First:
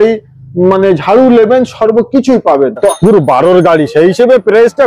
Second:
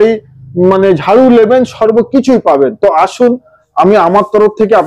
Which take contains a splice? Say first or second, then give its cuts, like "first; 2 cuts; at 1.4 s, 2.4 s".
first; 1 cut; at 2.9 s